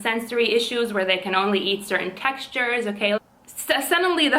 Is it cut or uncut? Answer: cut